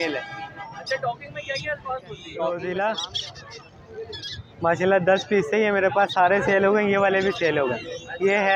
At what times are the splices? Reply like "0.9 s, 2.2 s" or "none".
2.5 s

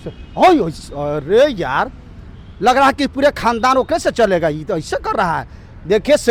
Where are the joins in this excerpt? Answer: none

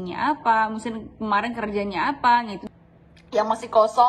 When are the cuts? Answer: 2.6 s

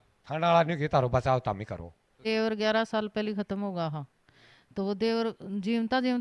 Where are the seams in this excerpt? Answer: 2.3 s

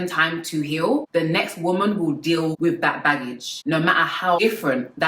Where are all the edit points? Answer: 1.1 s, 2.6 s, 4.4 s

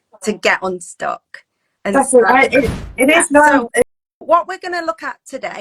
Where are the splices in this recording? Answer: 3.8 s

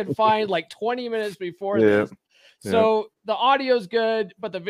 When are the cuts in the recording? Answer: none

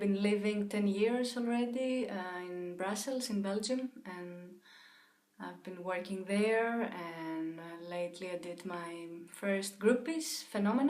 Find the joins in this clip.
7.0 s

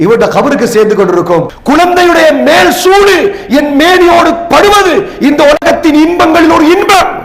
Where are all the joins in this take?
1.5 s

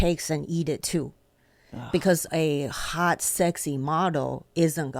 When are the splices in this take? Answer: none

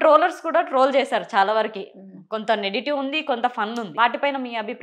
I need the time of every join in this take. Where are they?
3.9 s

